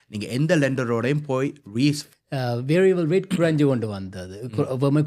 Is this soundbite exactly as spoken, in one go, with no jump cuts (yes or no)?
no